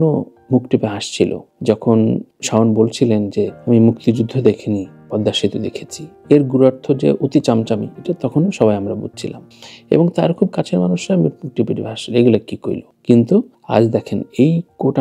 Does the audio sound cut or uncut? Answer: uncut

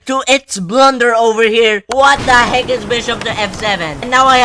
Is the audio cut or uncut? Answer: uncut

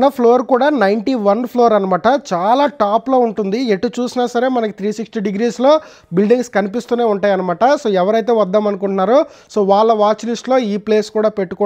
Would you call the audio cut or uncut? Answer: uncut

